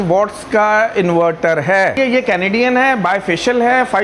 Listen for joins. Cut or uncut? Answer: cut